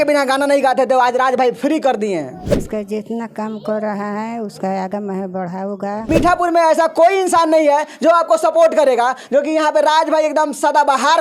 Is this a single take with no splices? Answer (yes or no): no